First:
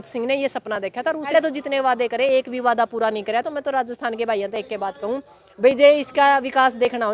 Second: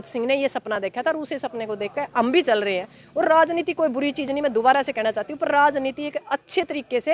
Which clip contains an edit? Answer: first; 1 cut; at 1.3 s

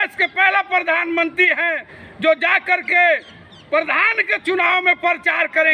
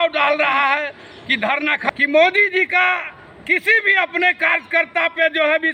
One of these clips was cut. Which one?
second; 1 cut; at 1.9 s

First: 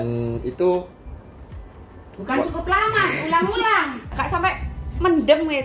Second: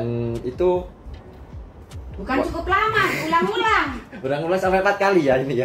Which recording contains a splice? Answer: first; 1 cut; at 4.0 s

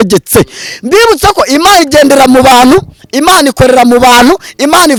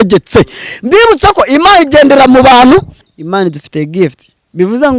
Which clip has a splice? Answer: second; 1 cut; at 3.0 s

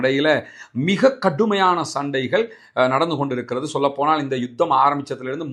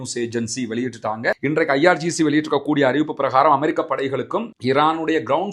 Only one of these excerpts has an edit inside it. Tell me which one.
second; 1 cut; at 1.4 s

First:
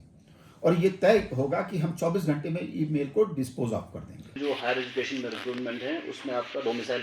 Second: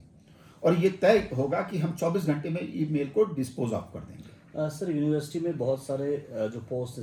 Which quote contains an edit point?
first; 1 cut; at 4.4 s

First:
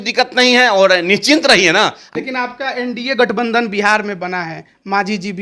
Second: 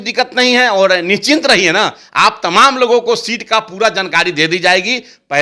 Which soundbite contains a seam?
first; 1 cut; at 2.0 s

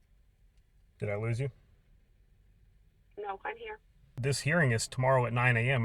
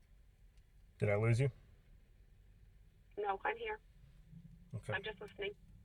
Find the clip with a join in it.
first; 1 cut; at 4.1 s

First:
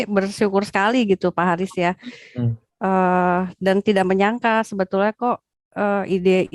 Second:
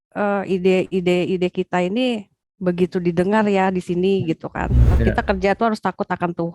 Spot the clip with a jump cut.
second; 1 cut; at 4.9 s

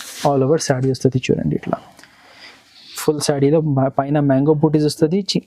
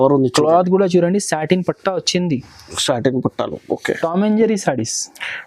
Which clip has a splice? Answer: second; 1 cut; at 3.9 s

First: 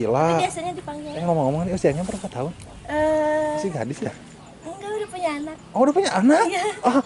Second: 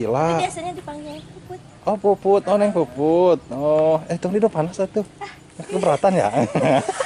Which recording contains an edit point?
first; 2 cuts; at 1.2 s, 3.6 s

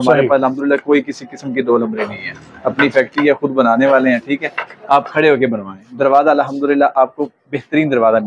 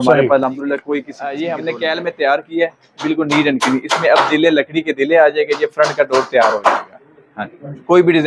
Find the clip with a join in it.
second; 1 cut; at 1.2 s

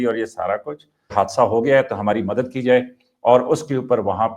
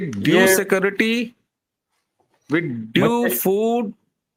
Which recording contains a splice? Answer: first; 1 cut; at 1.1 s

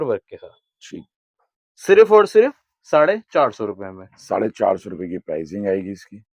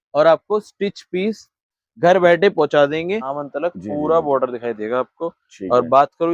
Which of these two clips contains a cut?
second; 2 cuts; at 1.8 s, 3.3 s

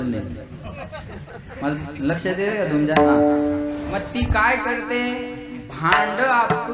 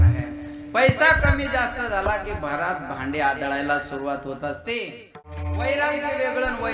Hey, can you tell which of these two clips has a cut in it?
second; 1 cut; at 5.5 s

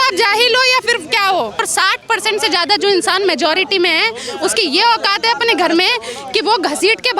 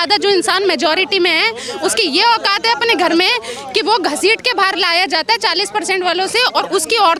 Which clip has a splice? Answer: first; 1 cut; at 1.7 s

